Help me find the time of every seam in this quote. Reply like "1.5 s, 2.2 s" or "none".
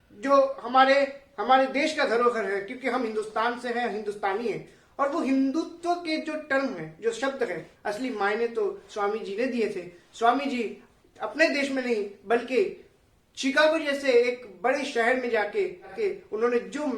7.7 s, 15.9 s